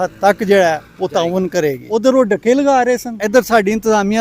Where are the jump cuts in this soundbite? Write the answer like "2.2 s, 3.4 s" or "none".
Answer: 1.8 s, 3.1 s